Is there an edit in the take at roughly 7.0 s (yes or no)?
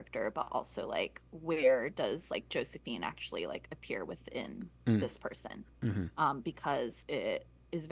yes